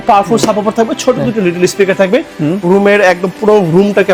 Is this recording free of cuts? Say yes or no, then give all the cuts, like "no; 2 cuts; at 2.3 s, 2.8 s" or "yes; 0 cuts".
yes; 0 cuts